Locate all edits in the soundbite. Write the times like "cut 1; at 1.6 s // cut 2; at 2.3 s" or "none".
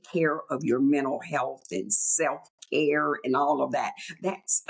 none